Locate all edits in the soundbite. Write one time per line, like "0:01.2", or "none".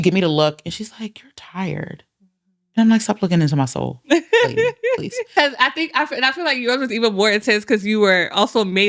0:05.3